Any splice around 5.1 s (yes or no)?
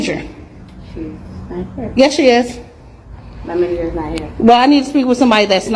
yes